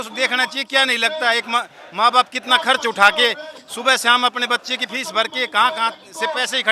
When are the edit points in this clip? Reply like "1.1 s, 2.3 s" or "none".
none